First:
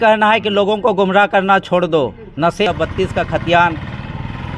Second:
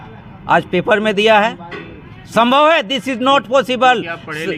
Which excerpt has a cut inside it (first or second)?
first